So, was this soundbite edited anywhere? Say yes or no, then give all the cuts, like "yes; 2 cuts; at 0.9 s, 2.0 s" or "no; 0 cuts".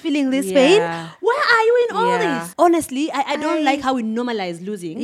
yes; 1 cut; at 2.4 s